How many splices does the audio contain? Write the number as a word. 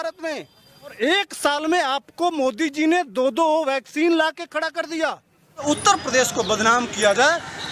two